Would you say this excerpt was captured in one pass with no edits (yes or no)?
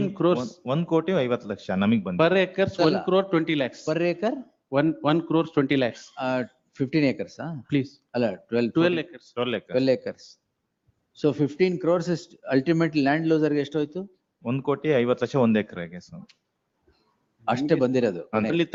yes